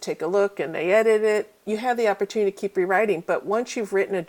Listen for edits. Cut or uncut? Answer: uncut